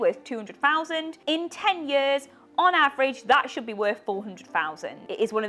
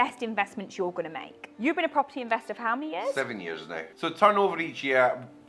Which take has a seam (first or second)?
second